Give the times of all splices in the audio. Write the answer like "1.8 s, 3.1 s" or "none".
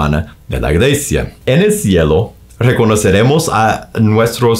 1.3 s